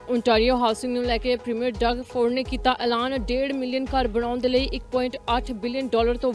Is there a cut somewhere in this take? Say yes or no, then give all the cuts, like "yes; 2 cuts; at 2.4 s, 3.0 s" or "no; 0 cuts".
no; 0 cuts